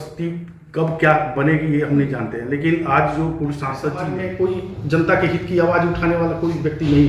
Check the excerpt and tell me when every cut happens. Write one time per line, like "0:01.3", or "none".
0:04.0